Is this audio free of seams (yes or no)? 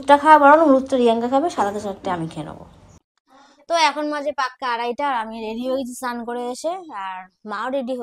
yes